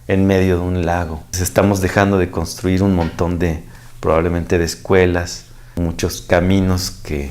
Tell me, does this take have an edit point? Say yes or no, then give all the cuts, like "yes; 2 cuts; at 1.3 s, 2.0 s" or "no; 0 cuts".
yes; 2 cuts; at 1.4 s, 5.6 s